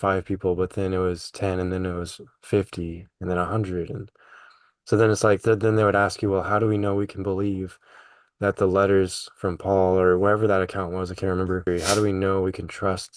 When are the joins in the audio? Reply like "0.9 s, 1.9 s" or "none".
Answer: 11.6 s